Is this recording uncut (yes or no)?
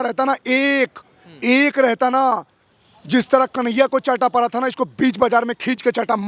yes